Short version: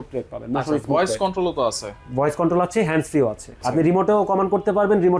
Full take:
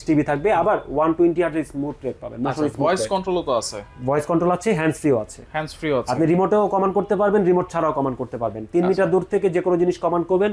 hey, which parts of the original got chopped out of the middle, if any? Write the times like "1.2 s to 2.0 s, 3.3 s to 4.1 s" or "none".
5.5 s to 6.1 s